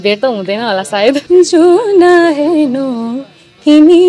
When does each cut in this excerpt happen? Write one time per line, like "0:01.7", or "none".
0:01.2